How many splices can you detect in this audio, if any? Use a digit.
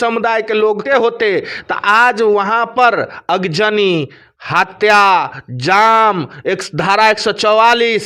1